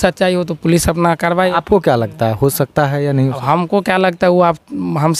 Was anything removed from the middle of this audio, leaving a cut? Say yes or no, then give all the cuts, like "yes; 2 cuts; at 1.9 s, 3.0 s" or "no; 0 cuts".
no; 0 cuts